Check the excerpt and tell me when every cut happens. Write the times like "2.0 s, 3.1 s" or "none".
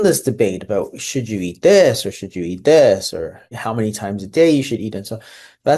none